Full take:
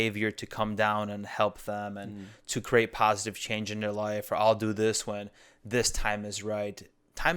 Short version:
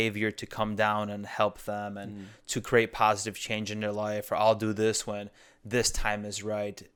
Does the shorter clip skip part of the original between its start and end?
no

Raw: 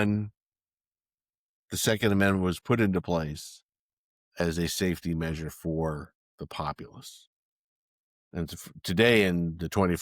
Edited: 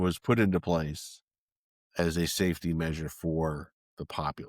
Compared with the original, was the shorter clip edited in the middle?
no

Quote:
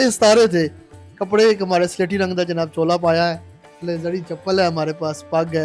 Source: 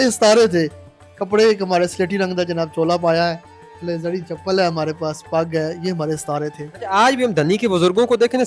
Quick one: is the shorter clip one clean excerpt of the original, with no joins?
yes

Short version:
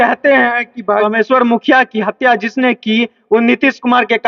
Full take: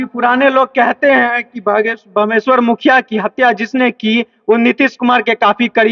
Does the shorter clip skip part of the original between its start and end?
yes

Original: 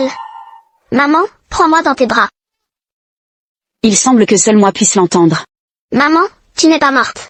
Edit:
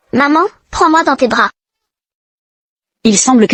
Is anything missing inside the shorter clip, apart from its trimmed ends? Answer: no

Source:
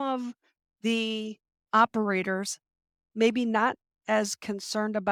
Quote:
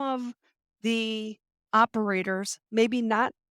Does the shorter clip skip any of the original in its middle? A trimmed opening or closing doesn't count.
yes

